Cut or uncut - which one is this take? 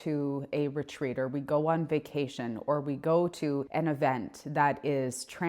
cut